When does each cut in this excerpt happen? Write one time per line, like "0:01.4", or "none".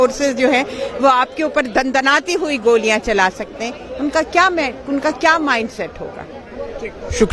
none

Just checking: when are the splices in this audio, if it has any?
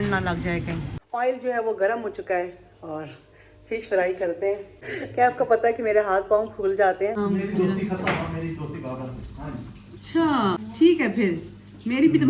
0:01.0
0:04.8
0:07.2
0:10.6

